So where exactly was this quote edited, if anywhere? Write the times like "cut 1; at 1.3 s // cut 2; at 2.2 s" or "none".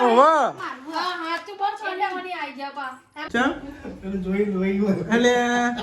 cut 1; at 3.1 s

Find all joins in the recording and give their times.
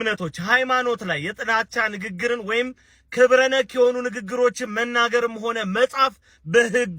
none

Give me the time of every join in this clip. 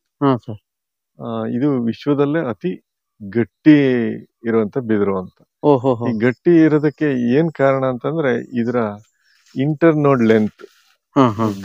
none

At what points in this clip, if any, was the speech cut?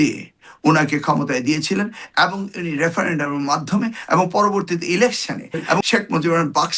cut 1; at 5.8 s

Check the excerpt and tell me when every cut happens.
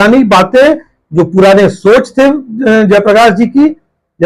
none

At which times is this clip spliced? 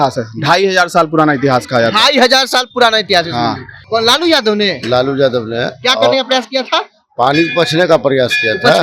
cut 1; at 3.8 s

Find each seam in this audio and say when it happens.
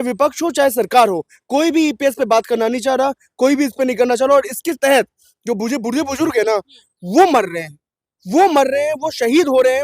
none

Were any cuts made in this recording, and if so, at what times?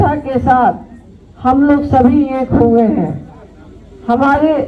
none

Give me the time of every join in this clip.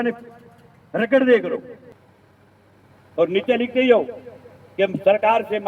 cut 1; at 1.8 s

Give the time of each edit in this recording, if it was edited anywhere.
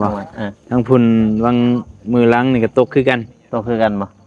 none

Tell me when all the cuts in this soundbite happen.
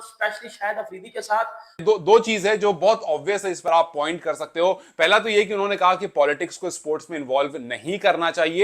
cut 1; at 1.8 s

